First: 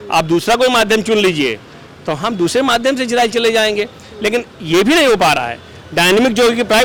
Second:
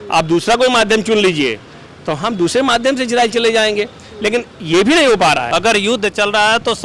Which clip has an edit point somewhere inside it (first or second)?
second